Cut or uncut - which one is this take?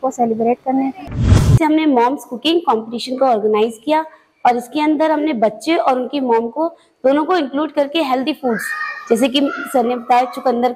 cut